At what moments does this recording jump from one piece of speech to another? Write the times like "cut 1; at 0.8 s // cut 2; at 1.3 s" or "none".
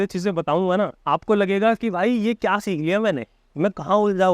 cut 1; at 1.0 s